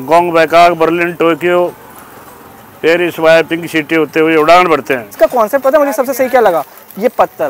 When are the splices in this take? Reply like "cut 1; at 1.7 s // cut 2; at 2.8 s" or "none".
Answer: cut 1; at 5.1 s